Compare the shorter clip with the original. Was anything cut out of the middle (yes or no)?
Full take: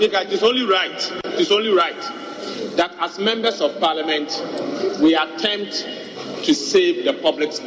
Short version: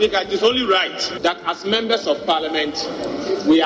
yes